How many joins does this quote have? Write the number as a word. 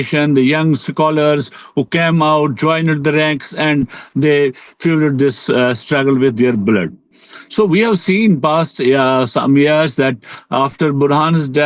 zero